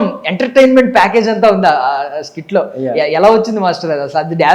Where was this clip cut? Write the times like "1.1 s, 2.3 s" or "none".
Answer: none